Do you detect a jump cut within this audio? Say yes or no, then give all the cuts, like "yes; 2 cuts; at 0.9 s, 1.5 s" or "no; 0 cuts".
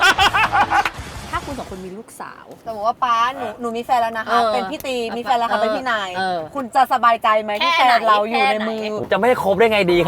yes; 3 cuts; at 1.2 s, 2.6 s, 8.9 s